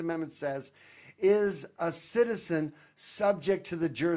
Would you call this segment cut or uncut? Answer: uncut